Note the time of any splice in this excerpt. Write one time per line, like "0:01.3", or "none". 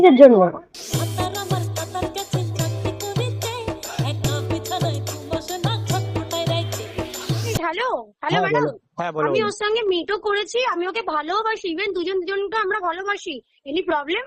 0:07.6